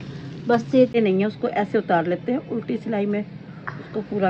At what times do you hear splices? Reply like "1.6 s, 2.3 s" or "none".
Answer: 1.0 s